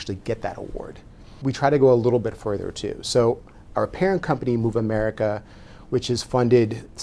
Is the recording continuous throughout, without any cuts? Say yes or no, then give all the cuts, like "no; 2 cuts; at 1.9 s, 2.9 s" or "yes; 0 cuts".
yes; 0 cuts